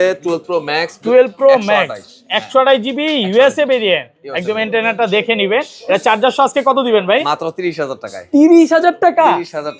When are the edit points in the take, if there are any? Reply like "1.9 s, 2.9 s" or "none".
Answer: none